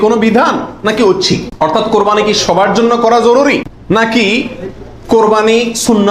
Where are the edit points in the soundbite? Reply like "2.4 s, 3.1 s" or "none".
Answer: 1.5 s, 3.7 s

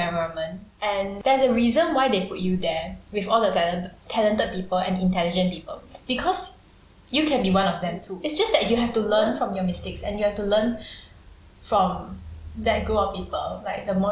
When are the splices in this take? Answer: 1.0 s

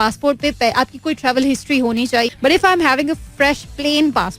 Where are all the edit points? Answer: 2.3 s

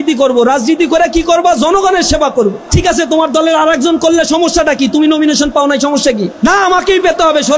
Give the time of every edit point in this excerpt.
2.7 s, 6.3 s

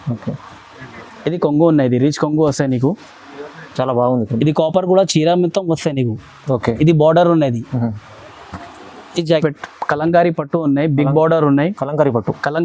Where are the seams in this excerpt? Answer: 9.3 s

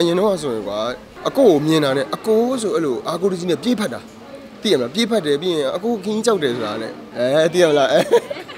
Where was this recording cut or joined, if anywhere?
1.2 s

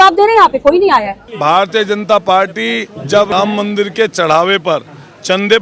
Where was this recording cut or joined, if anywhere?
1.3 s, 3.3 s

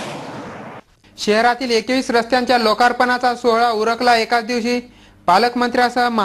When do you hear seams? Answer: none

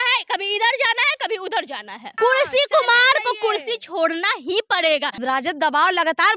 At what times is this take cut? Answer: 2.0 s, 5.2 s

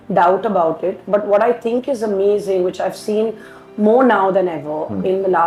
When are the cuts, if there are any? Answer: none

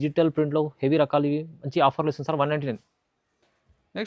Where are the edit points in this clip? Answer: none

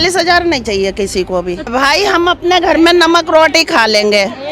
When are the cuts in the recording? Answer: 1.7 s

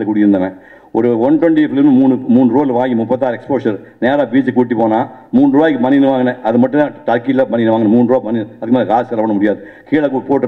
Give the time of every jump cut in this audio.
none

